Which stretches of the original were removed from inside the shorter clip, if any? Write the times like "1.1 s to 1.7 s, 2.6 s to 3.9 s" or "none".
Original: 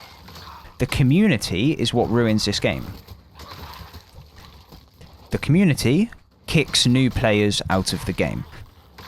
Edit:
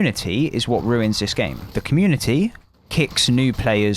2.9 s to 5.2 s